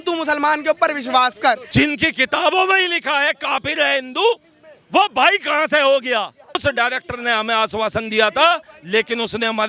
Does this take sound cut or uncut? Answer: cut